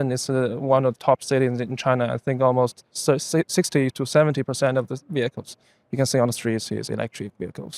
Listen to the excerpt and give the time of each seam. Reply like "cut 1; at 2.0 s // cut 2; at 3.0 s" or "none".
none